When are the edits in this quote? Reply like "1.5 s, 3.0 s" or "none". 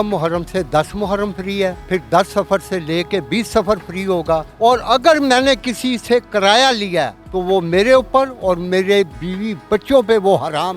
1.9 s, 4.5 s, 7.2 s, 9.2 s